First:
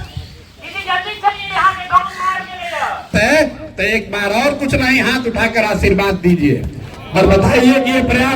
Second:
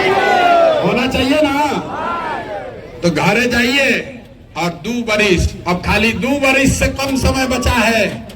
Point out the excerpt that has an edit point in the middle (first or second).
first